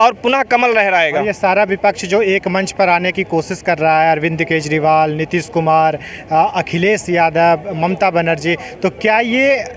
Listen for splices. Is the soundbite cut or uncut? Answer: uncut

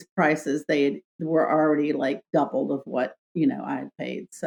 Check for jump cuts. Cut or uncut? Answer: uncut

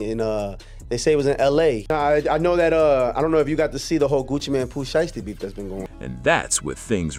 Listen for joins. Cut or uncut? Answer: uncut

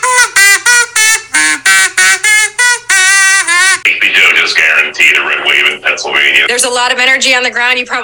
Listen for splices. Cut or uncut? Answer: cut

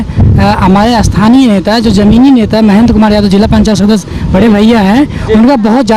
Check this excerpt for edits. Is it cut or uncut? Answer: uncut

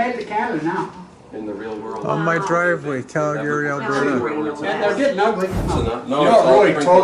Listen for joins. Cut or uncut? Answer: cut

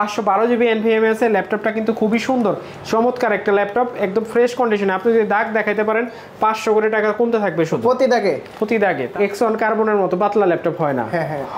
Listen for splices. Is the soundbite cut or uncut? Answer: cut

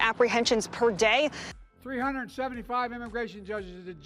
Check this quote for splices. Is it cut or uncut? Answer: cut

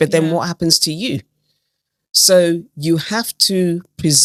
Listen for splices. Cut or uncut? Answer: uncut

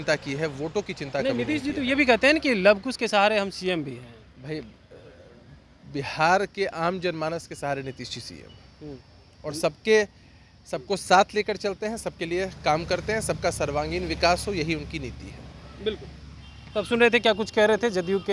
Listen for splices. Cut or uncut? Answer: uncut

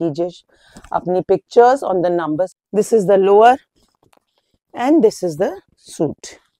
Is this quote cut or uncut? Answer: cut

